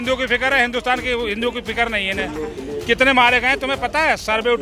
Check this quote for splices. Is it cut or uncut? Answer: uncut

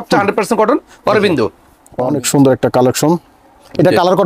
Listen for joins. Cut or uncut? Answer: cut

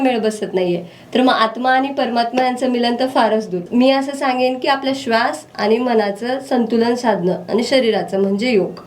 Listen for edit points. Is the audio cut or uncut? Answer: uncut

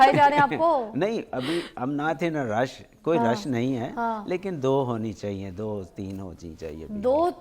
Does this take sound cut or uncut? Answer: uncut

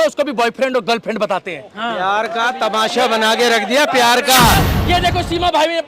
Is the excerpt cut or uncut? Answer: cut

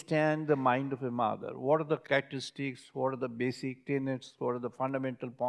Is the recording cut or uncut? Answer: cut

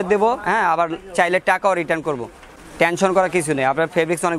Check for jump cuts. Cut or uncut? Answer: uncut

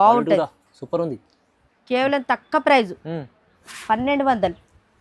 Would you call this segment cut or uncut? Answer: uncut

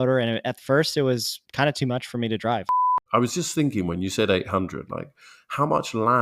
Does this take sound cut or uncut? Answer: cut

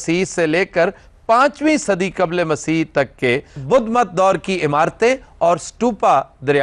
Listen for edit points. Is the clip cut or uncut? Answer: uncut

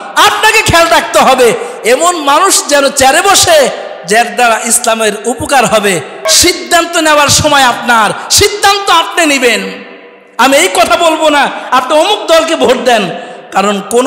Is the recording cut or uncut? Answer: cut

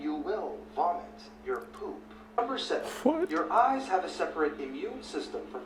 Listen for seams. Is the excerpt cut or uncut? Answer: cut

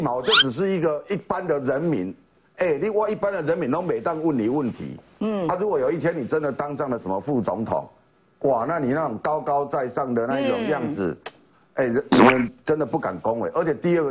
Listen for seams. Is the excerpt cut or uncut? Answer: uncut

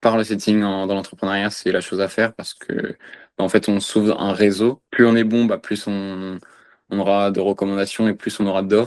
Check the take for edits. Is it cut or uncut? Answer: cut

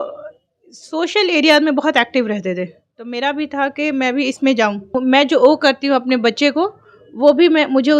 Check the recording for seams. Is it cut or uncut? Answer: cut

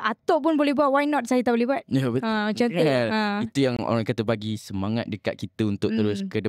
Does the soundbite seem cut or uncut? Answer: uncut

